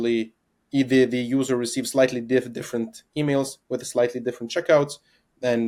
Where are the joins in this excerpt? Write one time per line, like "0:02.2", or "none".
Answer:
none

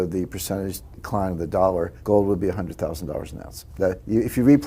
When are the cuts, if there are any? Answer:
0:01.0
0:02.0
0:03.8

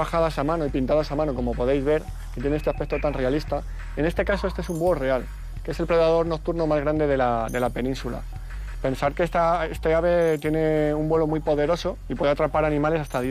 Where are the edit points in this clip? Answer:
none

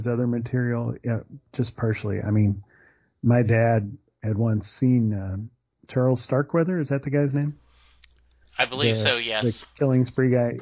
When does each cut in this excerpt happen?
none

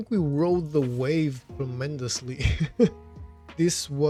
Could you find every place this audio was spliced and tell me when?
none

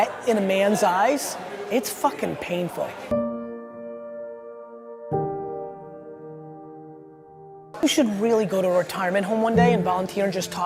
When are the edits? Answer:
none

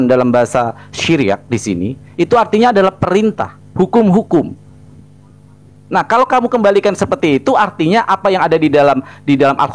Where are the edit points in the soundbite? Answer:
none

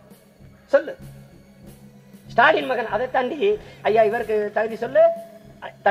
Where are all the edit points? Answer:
none

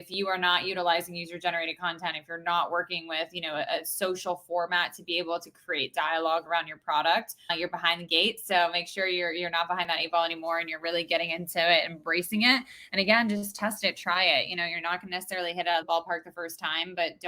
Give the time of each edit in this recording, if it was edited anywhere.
0:15.8

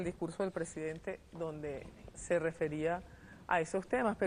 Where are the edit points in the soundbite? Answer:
0:01.7

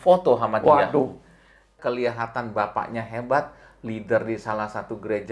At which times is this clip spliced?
0:01.8

